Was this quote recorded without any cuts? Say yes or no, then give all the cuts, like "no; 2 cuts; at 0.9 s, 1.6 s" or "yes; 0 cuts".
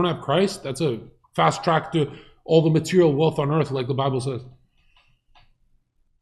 yes; 0 cuts